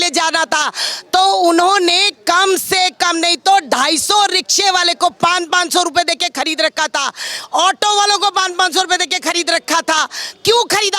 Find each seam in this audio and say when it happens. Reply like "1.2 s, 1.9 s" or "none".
none